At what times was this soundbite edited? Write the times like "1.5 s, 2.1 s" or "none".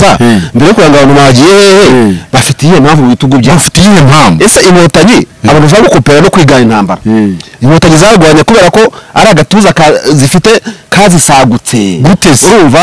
none